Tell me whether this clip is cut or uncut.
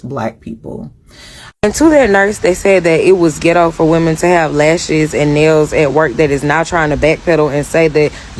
cut